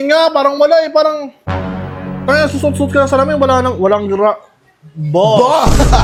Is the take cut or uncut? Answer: uncut